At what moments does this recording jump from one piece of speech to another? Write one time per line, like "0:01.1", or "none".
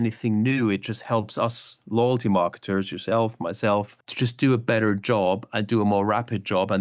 0:04.0